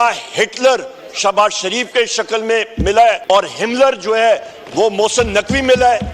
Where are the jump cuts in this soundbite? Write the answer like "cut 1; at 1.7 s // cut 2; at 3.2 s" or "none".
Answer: cut 1; at 3.2 s